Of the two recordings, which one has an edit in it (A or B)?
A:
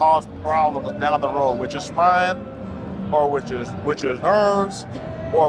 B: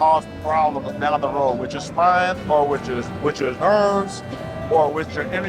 B